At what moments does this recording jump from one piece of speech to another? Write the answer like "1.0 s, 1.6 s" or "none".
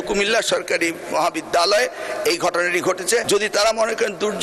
3.2 s